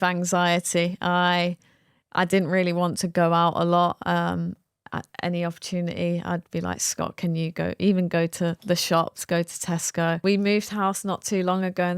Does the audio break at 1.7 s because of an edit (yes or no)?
no